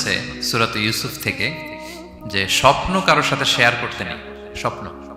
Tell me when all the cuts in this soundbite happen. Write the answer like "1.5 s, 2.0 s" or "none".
none

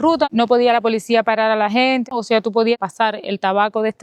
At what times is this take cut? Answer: none

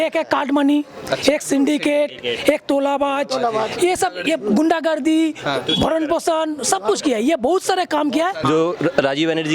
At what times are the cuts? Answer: 8.4 s

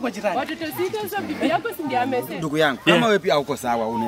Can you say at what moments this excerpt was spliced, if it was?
2.4 s

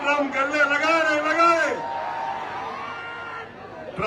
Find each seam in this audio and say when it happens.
none

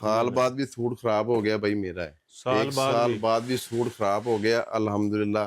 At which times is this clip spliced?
none

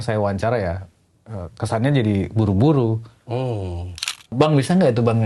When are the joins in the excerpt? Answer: 4.3 s

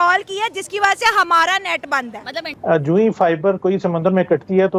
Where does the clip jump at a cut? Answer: 2.4 s

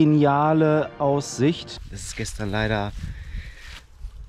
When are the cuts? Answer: 1.7 s

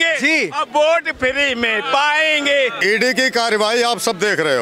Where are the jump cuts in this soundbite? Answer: 2.8 s

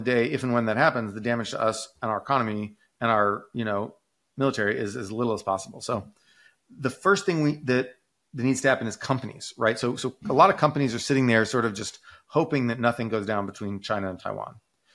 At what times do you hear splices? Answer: none

